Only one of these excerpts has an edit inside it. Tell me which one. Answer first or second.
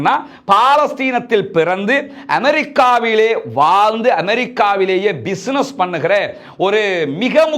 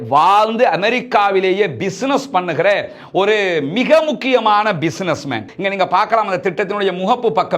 second